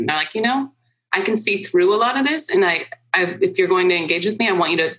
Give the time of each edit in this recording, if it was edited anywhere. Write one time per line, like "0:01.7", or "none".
none